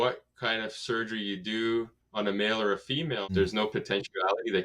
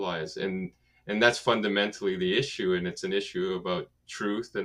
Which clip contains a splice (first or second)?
first